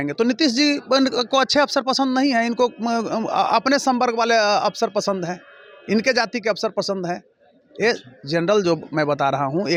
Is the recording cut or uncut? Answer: uncut